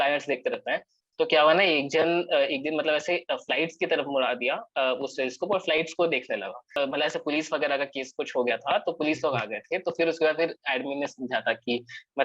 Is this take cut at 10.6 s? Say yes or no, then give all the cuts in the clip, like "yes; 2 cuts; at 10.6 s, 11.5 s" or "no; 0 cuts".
no; 1 cut; at 6.7 s